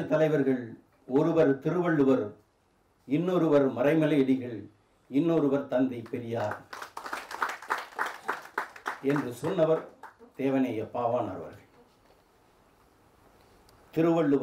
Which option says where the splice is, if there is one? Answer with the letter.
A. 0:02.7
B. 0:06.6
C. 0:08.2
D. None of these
D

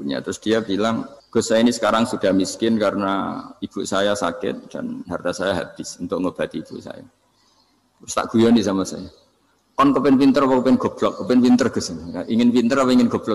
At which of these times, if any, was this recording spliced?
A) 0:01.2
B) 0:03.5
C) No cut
A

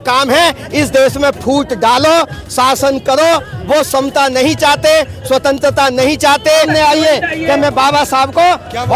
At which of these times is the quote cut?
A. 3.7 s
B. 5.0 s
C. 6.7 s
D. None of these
C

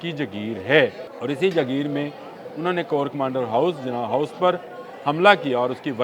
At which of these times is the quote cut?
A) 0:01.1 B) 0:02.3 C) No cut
A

